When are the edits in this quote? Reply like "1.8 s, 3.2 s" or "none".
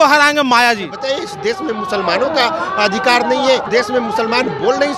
0.9 s, 3.6 s